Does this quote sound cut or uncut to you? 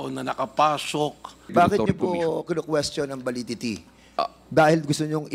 cut